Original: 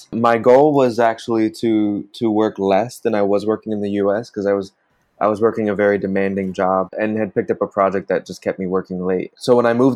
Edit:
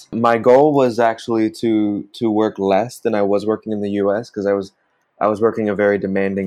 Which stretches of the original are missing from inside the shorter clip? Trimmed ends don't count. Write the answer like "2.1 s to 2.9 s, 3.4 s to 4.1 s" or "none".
none